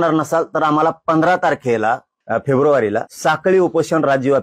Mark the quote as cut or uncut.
cut